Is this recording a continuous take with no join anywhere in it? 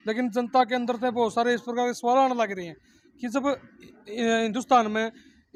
yes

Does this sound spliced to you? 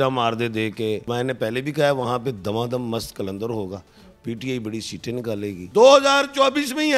yes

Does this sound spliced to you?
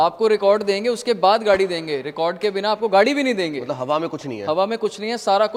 no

